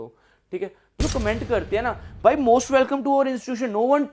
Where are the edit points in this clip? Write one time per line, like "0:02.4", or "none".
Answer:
0:01.0